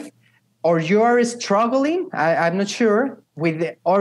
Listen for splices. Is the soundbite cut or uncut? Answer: uncut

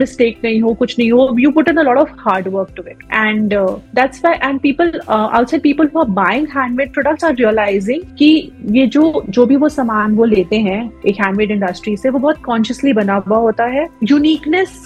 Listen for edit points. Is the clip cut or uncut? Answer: cut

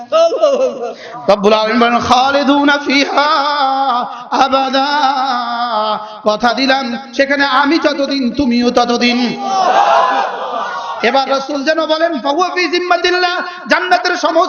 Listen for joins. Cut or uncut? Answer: cut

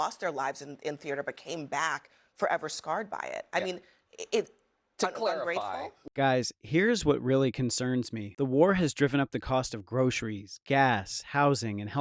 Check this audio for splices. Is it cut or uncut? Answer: uncut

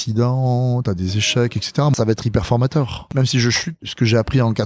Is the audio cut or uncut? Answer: cut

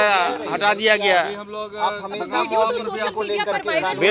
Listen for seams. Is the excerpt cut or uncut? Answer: uncut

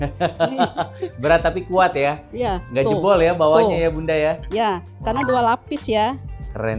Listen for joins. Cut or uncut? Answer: uncut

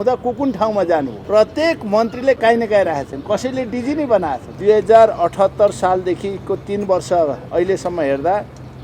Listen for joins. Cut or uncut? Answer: cut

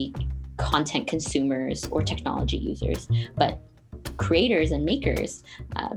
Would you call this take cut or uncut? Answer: uncut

